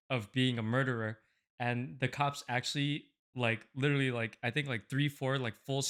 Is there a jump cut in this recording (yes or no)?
no